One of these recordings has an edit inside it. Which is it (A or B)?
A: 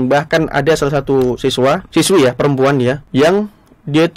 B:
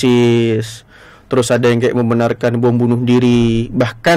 A